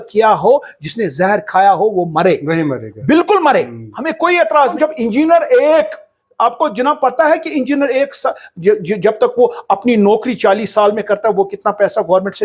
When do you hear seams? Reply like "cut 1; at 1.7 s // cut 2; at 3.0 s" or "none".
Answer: cut 1; at 4.7 s